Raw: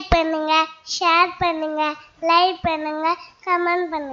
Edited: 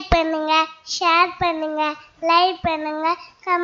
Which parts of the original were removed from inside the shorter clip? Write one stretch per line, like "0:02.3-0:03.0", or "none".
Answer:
none